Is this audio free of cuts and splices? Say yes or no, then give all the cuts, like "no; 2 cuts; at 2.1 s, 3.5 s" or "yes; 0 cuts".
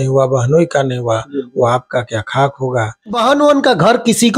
no; 1 cut; at 3.2 s